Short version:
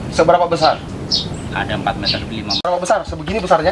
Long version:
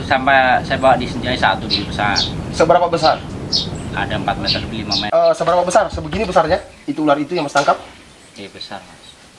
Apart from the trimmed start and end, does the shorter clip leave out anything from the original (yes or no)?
yes